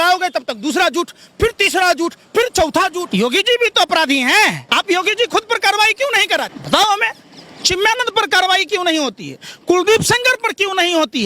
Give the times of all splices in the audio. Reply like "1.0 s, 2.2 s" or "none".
3.0 s, 4.6 s, 6.6 s